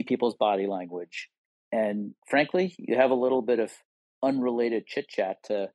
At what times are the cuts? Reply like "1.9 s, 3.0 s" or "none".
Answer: 4.1 s